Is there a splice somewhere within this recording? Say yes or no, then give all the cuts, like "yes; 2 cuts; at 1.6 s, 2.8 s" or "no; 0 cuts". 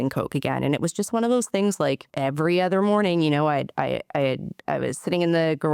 yes; 1 cut; at 2.1 s